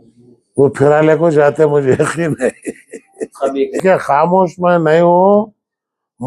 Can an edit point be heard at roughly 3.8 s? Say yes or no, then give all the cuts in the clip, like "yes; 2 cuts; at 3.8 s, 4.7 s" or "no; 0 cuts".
yes; 1 cut; at 3.8 s